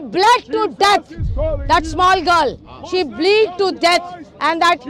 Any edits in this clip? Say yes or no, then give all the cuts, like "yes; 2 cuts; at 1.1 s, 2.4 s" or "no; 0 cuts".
no; 0 cuts